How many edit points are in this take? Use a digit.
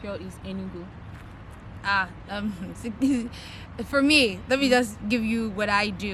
0